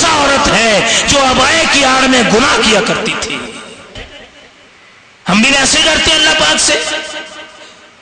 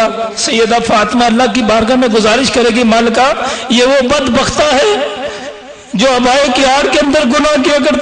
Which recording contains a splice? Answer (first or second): first